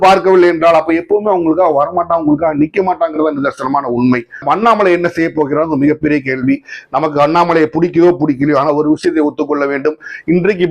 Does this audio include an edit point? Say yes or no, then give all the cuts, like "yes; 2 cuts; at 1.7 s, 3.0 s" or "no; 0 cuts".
yes; 1 cut; at 4.4 s